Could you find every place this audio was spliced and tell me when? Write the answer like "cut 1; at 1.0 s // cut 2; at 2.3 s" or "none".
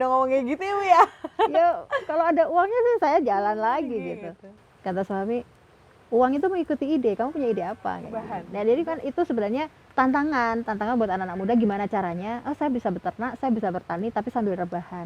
cut 1; at 8.4 s